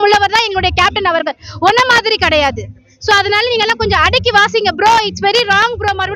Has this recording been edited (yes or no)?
no